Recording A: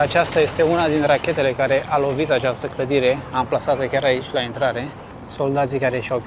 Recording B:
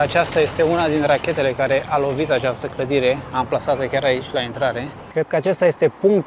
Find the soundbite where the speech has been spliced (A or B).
B